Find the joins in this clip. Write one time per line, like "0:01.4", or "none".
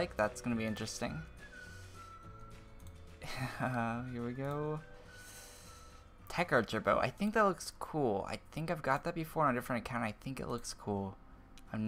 0:10.7